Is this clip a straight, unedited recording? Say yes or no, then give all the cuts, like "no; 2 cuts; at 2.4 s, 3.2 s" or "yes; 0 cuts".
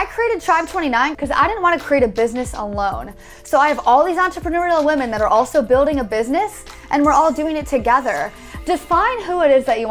no; 3 cuts; at 1.1 s, 6.7 s, 8.4 s